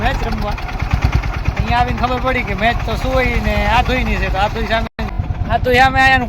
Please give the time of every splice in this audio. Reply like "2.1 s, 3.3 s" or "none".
5.0 s